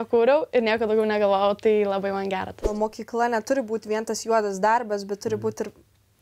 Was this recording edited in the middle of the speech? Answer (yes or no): yes